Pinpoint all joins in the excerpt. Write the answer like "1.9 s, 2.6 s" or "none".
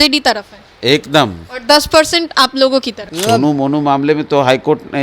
3.0 s